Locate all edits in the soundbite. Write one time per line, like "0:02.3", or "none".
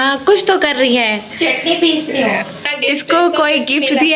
0:02.6